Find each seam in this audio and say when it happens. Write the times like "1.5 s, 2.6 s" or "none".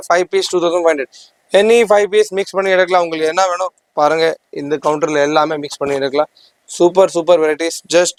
none